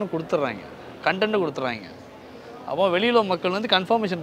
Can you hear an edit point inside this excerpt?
no; 0 cuts

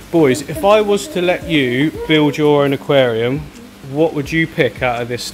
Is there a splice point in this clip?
no; 0 cuts

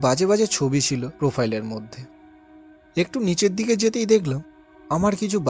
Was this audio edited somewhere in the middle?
yes; 1 cut; at 1.1 s

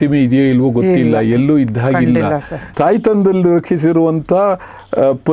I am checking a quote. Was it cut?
yes; 1 cut; at 2.6 s

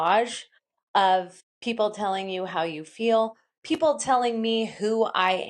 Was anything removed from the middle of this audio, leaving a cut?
yes; 1 cut; at 1.4 s

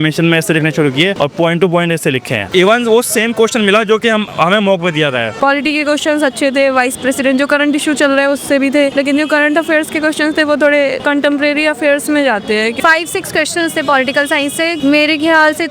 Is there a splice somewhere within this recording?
yes; 7 cuts; at 1.1 s, 2.4 s, 5.3 s, 8.9 s, 11.0 s, 12.8 s, 14.8 s

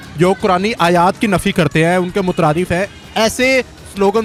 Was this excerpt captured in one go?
yes; 0 cuts

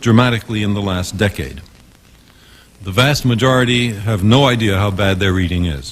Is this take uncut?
yes; 0 cuts

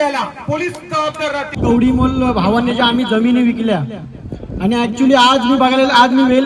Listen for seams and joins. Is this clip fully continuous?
no; 1 cut; at 1.6 s

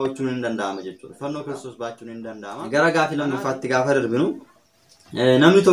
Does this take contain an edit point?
yes; 1 cut; at 2.5 s

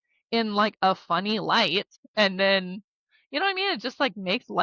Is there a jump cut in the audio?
yes; 1 cut; at 2.0 s

